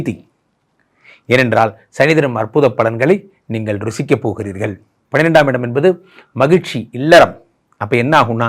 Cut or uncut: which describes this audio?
cut